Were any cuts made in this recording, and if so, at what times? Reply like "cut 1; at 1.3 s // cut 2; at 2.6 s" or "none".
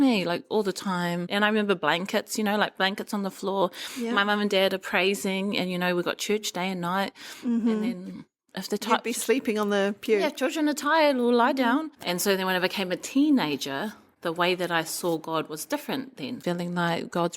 cut 1; at 1.3 s // cut 2; at 12.0 s // cut 3; at 14.1 s // cut 4; at 16.4 s